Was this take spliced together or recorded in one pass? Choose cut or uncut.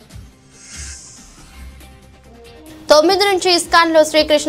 uncut